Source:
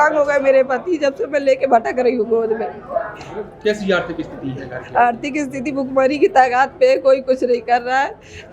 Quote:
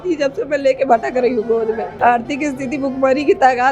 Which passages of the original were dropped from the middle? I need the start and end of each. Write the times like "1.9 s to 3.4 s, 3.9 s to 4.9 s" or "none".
2.7 s to 4.8 s